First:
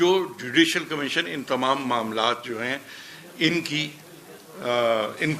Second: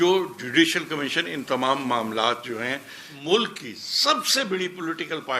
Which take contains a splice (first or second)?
second